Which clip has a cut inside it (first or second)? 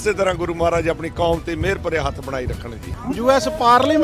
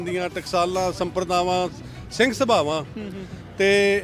first